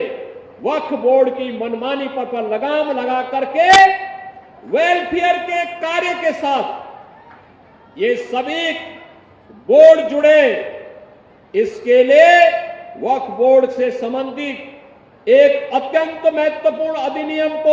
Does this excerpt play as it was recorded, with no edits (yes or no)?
yes